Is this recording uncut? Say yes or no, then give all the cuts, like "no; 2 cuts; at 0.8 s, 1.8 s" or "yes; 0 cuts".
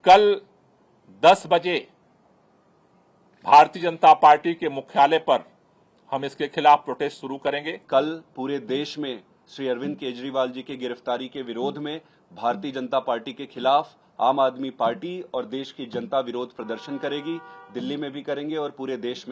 yes; 0 cuts